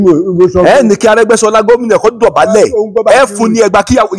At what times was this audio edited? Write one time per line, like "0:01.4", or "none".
none